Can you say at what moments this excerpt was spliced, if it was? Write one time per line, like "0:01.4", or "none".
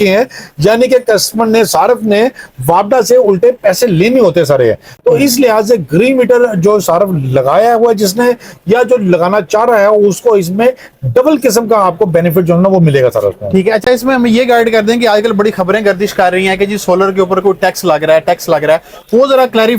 none